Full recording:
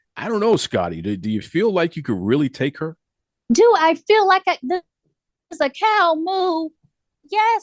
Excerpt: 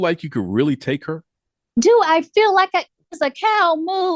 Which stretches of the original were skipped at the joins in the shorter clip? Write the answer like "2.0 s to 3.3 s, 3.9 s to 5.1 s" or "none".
4.6 s to 5.3 s